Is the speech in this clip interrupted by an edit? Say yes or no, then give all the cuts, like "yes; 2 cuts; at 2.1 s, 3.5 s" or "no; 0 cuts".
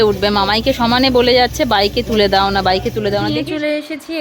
yes; 1 cut; at 3.2 s